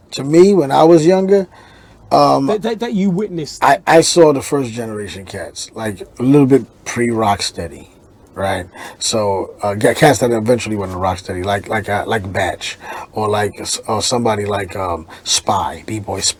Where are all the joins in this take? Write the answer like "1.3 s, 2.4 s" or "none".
none